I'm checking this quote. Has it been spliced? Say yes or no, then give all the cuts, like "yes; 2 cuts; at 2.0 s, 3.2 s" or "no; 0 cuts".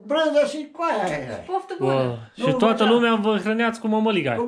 no; 0 cuts